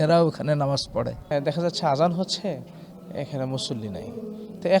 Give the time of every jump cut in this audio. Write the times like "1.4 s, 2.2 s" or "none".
1.3 s